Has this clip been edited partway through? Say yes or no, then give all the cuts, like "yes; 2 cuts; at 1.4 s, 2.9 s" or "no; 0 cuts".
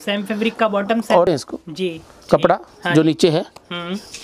yes; 1 cut; at 1.3 s